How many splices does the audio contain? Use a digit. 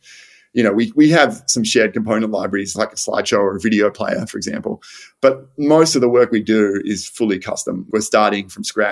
2